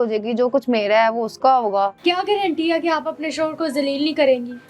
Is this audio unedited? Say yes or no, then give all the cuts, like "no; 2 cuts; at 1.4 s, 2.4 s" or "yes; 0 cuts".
no; 1 cut; at 2.0 s